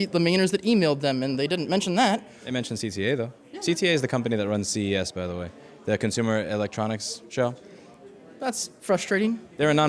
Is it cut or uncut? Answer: uncut